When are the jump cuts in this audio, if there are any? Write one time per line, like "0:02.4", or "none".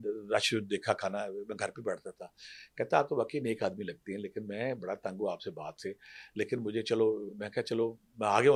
none

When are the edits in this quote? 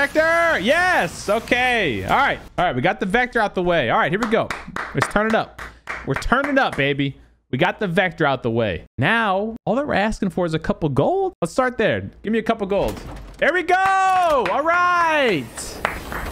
none

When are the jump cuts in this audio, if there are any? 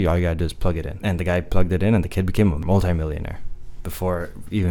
0:00.9
0:02.6

